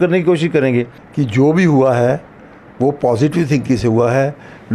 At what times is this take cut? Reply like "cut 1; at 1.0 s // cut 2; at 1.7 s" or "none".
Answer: cut 1; at 1.0 s

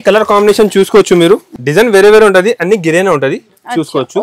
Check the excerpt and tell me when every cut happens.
cut 1; at 1.5 s

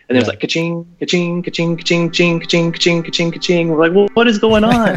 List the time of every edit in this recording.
none

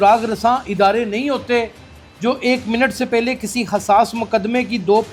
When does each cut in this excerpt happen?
none

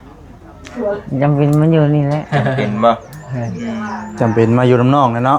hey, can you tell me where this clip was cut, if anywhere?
none

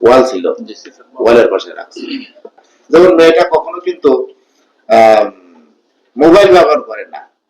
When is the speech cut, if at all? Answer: cut 1; at 2.7 s

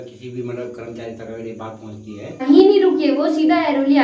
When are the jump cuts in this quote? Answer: cut 1; at 2.4 s

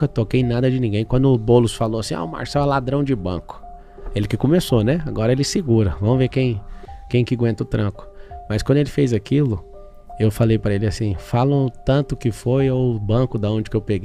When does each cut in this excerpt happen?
none

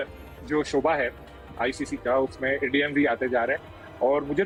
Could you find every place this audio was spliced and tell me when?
none

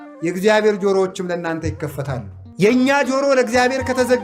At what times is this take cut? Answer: cut 1; at 2.4 s

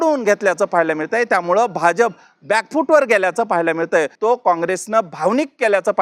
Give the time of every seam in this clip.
cut 1; at 4.1 s

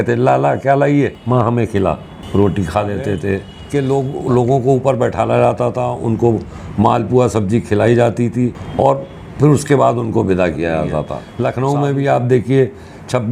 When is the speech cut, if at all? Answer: cut 1; at 1.2 s // cut 2; at 3.5 s // cut 3; at 8.6 s // cut 4; at 11.2 s

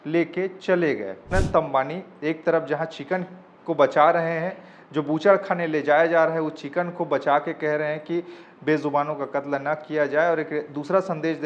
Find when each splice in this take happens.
cut 1; at 1.3 s

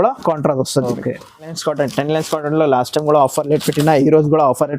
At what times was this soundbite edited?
cut 1; at 1.6 s

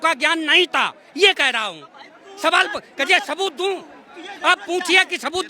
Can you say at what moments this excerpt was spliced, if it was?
none

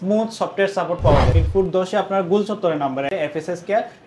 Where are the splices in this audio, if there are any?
cut 1; at 1.3 s // cut 2; at 3.1 s

